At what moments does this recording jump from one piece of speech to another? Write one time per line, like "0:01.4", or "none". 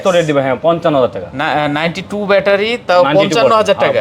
none